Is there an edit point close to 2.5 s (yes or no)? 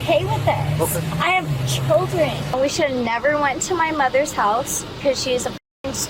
yes